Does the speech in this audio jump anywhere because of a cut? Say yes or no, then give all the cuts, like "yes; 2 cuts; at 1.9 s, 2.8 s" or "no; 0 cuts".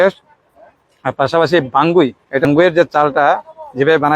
yes; 1 cut; at 2.5 s